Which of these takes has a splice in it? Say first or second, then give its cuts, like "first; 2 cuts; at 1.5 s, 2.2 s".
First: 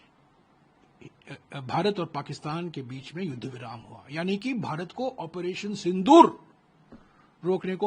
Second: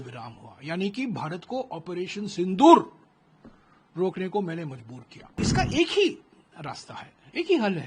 second; 1 cut; at 5.4 s